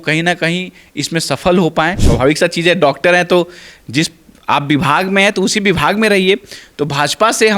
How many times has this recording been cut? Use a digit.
1